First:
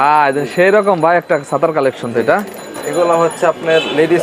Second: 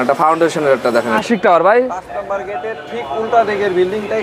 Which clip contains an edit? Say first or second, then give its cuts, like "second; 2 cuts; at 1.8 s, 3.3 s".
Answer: second; 1 cut; at 1.2 s